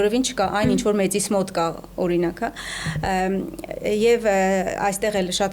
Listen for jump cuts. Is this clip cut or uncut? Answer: uncut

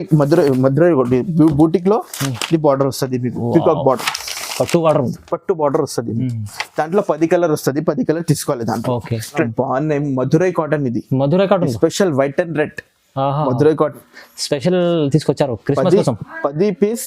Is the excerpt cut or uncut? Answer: cut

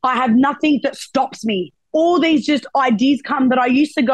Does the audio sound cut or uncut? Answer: cut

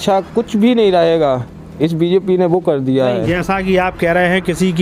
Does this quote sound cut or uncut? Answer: uncut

